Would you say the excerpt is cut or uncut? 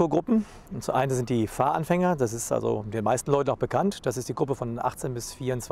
uncut